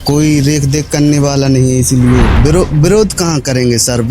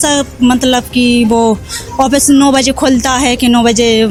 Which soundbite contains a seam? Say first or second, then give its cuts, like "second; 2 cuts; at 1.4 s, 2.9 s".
first; 1 cut; at 2.4 s